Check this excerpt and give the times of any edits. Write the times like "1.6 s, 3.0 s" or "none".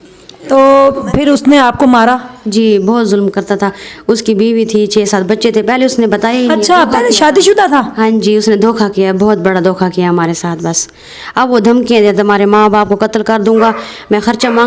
1.1 s